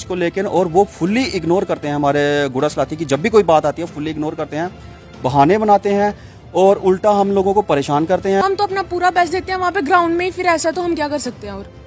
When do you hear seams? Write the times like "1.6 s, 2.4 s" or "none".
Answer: 8.4 s